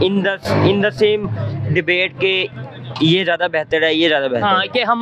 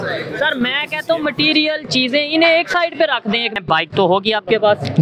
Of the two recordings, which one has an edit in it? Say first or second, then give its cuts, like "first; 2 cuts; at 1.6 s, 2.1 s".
second; 1 cut; at 3.5 s